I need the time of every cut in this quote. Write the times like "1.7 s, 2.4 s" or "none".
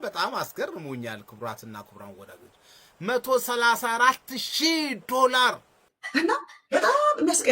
5.9 s